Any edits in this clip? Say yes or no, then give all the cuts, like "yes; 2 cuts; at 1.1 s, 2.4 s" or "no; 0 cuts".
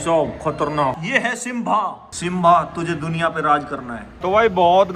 yes; 2 cuts; at 1.0 s, 4.1 s